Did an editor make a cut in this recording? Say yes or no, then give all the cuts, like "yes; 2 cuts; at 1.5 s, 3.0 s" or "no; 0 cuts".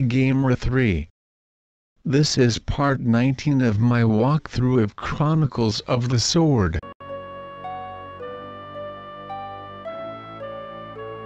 no; 0 cuts